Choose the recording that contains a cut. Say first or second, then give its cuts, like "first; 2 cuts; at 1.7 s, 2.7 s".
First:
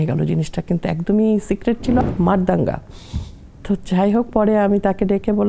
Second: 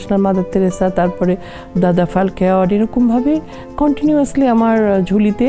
first; 1 cut; at 2.0 s